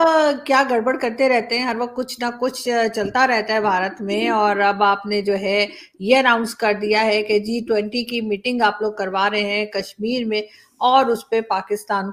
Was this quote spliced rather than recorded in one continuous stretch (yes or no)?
no